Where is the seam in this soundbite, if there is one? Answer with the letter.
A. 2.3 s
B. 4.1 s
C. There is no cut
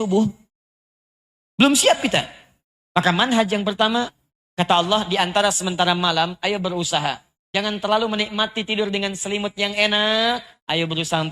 B